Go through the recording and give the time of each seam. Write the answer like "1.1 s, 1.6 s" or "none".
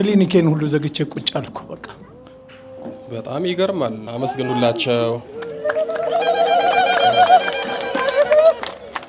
4.0 s